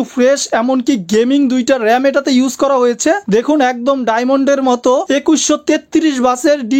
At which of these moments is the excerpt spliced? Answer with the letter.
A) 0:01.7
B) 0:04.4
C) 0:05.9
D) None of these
D